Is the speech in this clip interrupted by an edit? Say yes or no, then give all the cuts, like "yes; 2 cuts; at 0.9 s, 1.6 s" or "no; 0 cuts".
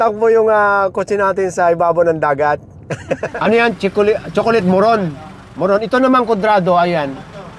yes; 1 cut; at 3.3 s